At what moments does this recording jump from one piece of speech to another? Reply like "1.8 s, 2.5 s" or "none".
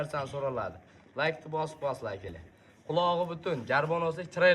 none